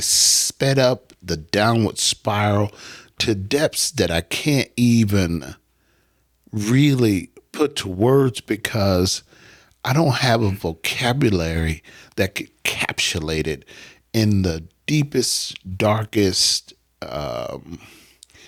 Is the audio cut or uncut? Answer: uncut